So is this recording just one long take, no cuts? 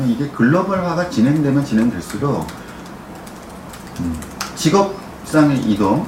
yes; 0 cuts

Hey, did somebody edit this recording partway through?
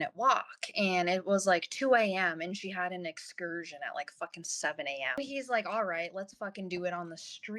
yes; 1 cut; at 5.1 s

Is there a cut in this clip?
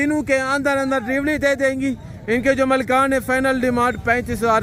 no; 0 cuts

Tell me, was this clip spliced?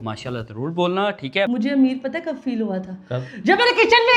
yes; 1 cut; at 1.5 s

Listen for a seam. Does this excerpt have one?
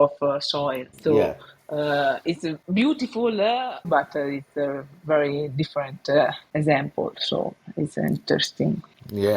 yes; 3 cuts; at 0.9 s, 2.6 s, 3.9 s

